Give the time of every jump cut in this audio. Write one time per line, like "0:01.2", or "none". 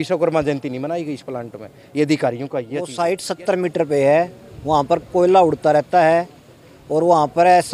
0:02.8